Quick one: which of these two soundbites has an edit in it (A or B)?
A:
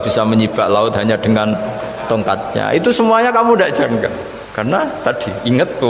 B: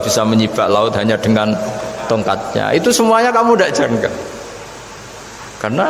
A